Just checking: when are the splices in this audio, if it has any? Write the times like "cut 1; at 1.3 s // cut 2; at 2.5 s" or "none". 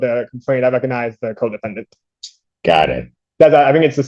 none